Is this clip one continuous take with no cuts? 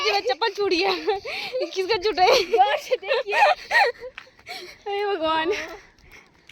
yes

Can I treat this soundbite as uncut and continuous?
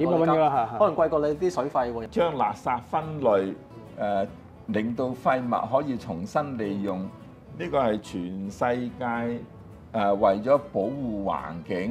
no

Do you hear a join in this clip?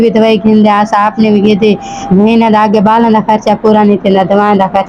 no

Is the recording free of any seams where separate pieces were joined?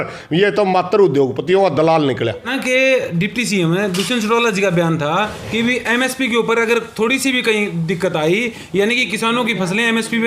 no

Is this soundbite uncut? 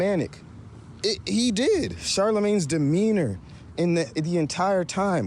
no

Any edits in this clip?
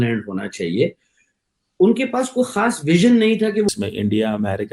yes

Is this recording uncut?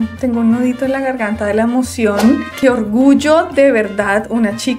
yes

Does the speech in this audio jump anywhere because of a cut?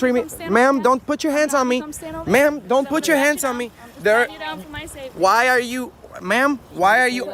no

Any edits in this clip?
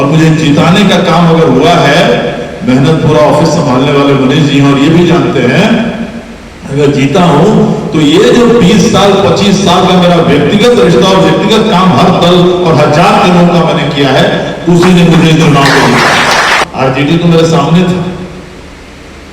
yes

